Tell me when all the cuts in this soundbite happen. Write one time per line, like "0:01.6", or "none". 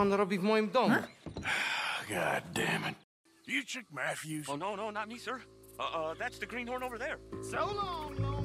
0:03.0
0:07.3

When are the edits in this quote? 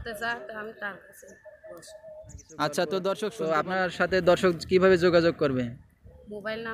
0:03.4

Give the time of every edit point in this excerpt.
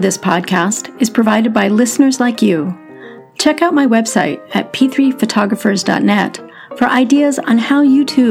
none

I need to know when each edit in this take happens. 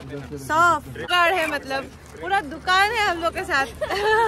0:01.0

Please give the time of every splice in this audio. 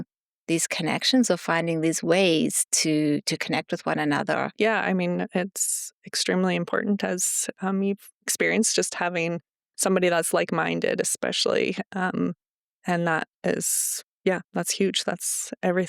0:04.5

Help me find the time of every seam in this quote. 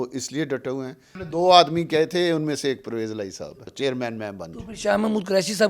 0:01.1
0:03.7

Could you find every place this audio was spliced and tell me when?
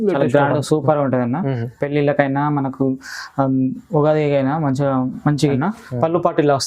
0:05.6

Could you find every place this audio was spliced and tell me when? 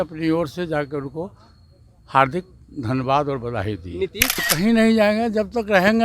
0:04.4

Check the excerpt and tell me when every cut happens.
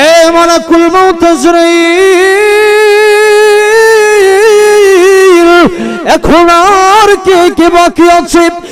none

